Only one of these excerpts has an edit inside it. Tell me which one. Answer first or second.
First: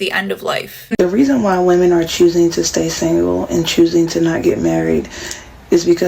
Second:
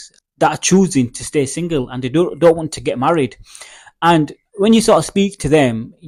first